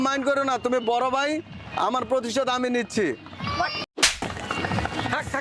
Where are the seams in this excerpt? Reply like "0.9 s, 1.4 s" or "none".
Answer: 4.0 s